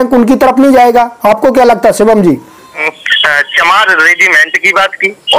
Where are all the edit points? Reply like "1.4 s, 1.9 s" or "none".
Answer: 2.8 s